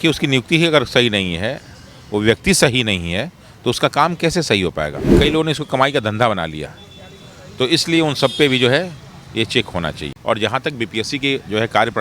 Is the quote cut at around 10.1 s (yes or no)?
yes